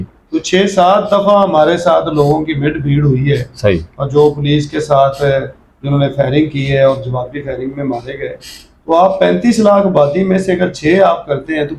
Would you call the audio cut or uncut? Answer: uncut